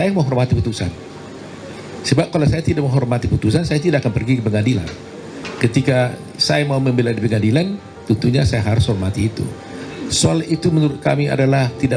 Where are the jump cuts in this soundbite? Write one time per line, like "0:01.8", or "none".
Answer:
none